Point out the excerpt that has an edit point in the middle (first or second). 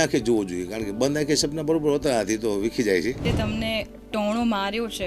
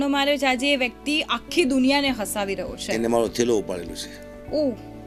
first